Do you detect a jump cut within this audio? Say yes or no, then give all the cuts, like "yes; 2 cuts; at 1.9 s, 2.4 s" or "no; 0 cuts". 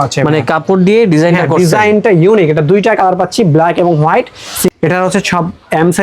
yes; 1 cut; at 4.7 s